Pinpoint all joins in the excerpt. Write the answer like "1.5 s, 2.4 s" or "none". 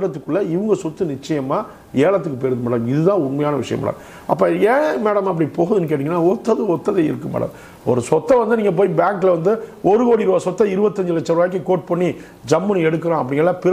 none